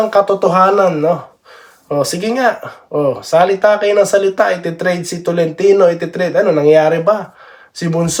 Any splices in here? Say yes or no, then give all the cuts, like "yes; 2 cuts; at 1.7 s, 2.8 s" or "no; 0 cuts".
no; 0 cuts